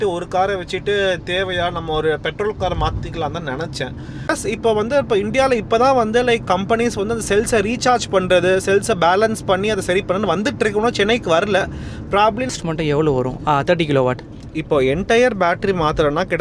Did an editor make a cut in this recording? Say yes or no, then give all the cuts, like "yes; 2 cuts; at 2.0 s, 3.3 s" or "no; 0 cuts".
yes; 2 cuts; at 4.3 s, 12.5 s